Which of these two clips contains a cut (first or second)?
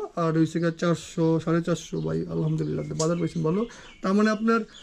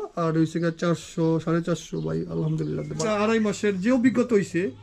second